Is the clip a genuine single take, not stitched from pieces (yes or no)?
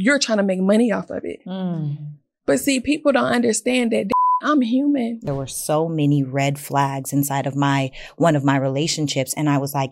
no